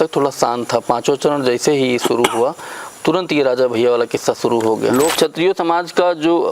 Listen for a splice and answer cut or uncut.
cut